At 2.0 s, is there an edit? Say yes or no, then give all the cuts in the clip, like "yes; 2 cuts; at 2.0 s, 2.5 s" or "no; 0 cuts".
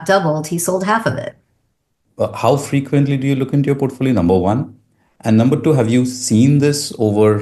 yes; 1 cut; at 2.0 s